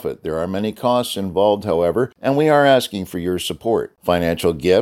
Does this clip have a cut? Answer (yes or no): yes